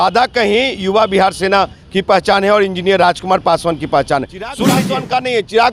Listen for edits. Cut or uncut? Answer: cut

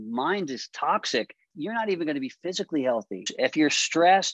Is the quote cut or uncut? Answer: cut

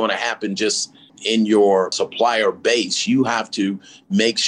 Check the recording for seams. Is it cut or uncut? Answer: cut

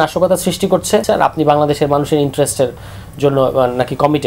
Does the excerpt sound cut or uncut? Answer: cut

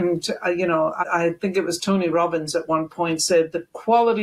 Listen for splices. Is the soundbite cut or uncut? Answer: cut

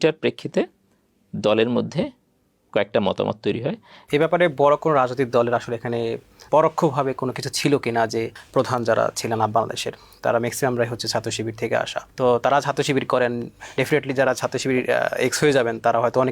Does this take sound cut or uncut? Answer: cut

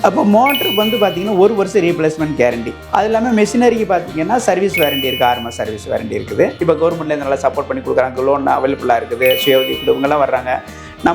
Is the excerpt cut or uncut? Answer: cut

